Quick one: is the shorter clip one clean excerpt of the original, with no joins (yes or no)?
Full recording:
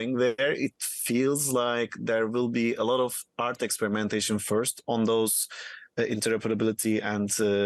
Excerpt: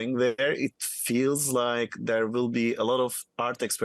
yes